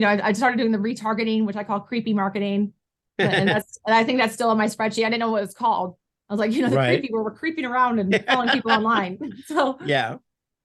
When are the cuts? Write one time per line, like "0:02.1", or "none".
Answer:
none